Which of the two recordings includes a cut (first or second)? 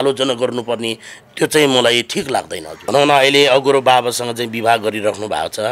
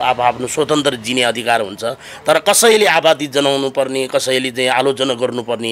first